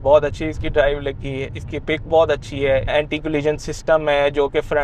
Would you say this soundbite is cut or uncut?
cut